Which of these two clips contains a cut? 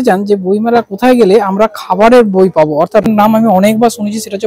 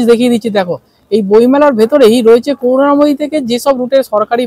first; 1 cut; at 3.1 s

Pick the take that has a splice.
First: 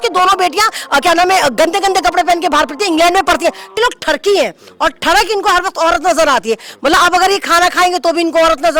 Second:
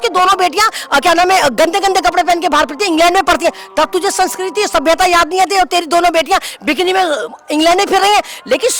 first; 1 cut; at 3.8 s

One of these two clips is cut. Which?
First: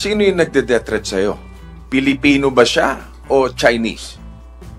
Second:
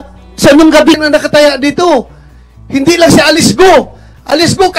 second; 1 cut; at 0.9 s

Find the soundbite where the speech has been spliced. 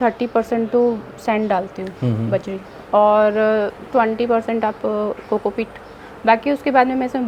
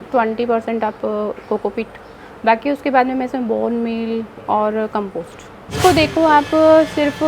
second; 1 cut; at 5.8 s

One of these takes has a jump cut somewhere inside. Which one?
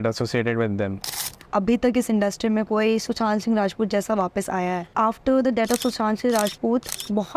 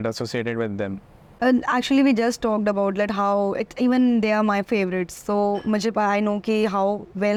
first; 2 cuts; at 1.3 s, 4.9 s

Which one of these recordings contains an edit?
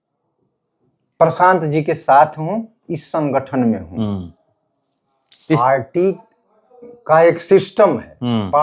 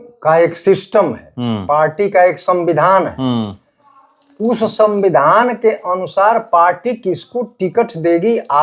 first; 1 cut; at 5.6 s

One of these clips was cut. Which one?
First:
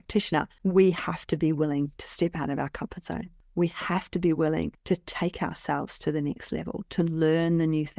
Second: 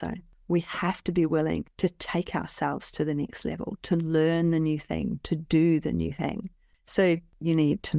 second; 1 cut; at 6.7 s

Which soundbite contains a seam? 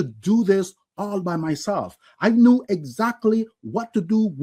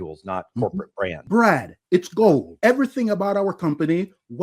second; 2 cuts; at 1.2 s, 2.5 s

